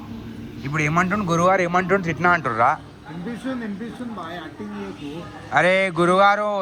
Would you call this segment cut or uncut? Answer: uncut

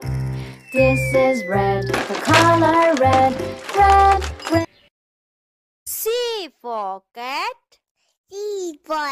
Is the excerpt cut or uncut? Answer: uncut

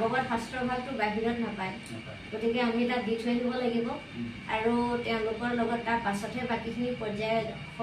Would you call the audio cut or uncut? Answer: uncut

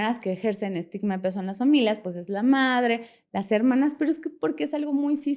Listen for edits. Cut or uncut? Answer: uncut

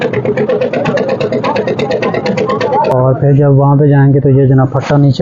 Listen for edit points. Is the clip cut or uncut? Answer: cut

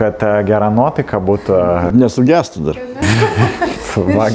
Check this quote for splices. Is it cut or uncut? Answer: uncut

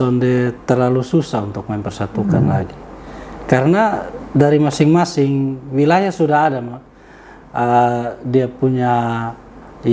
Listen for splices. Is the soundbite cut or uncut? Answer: uncut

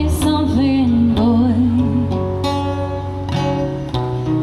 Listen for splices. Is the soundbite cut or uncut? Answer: uncut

